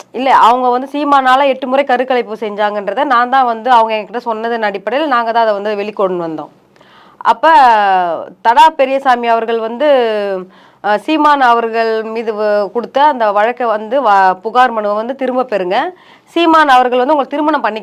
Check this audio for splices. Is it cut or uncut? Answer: uncut